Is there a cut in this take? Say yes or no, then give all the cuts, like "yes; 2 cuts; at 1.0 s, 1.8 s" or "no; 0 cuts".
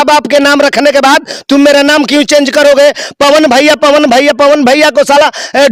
no; 0 cuts